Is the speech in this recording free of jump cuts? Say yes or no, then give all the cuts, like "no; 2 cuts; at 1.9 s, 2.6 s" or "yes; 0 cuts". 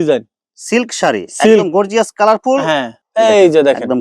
no; 1 cut; at 3.0 s